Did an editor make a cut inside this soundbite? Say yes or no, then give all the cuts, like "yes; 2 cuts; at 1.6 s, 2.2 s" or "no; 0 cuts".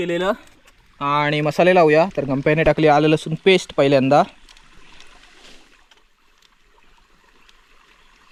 no; 0 cuts